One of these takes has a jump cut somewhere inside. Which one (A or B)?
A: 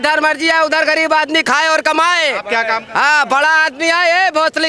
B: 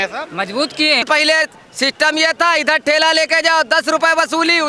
B